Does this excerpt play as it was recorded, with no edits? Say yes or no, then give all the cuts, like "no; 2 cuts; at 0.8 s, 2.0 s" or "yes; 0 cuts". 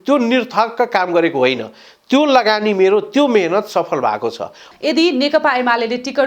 no; 1 cut; at 4.7 s